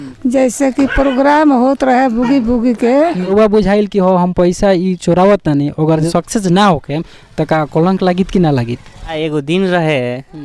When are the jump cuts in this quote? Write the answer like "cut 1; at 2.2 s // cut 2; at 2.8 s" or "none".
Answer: cut 1; at 3.3 s // cut 2; at 9.1 s